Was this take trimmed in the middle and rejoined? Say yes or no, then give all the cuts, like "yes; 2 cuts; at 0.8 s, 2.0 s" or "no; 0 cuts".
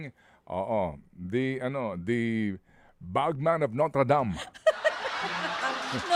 no; 0 cuts